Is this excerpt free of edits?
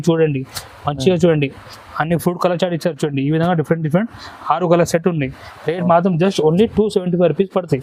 yes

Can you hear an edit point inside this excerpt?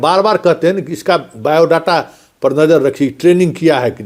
no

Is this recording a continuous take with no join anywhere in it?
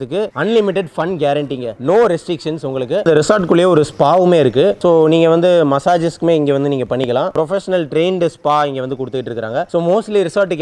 yes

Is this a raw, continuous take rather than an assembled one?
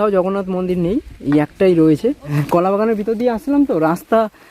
no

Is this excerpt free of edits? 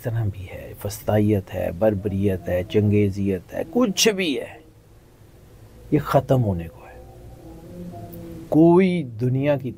yes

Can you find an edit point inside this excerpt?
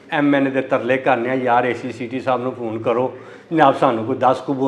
no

